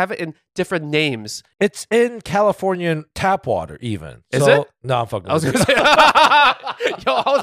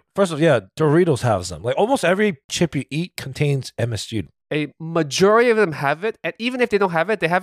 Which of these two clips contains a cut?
second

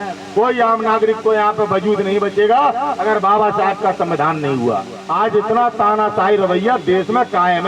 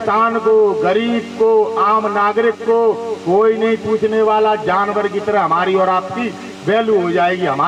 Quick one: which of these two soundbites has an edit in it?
first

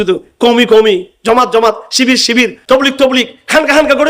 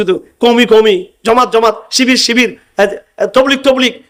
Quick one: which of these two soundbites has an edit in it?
first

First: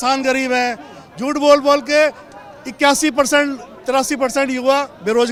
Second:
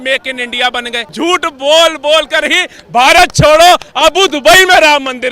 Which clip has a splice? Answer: second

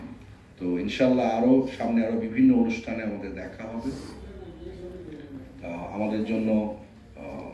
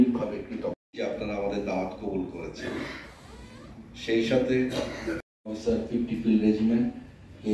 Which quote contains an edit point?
second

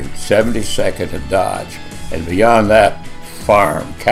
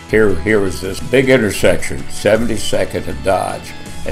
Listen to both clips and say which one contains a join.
second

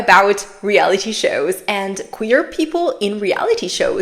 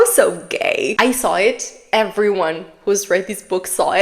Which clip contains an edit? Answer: second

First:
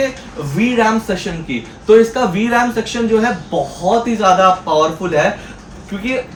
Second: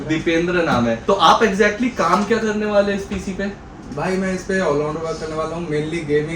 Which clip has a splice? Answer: second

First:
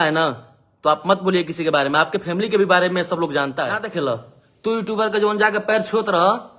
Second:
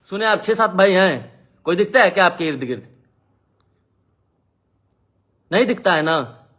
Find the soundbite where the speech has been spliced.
first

